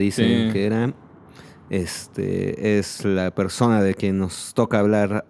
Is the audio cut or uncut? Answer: uncut